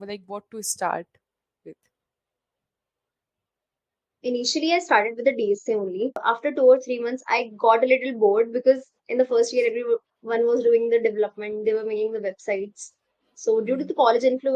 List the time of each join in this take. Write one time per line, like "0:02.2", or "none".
0:06.2